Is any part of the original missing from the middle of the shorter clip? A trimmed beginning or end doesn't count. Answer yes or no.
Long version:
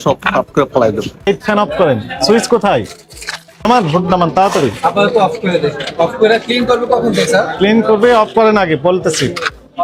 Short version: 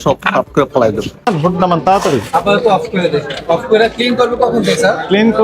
yes